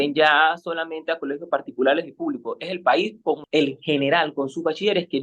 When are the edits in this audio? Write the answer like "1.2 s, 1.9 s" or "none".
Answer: 3.4 s